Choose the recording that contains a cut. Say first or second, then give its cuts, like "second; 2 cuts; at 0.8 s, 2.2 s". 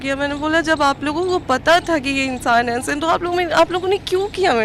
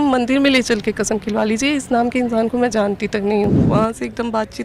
second; 1 cut; at 3.6 s